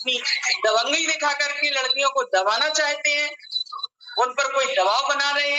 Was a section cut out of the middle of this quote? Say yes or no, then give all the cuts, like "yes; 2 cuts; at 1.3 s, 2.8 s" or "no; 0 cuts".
no; 0 cuts